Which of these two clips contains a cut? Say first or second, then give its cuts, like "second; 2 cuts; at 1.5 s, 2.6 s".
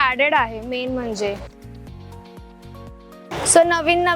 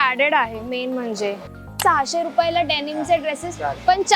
second; 1 cut; at 1.8 s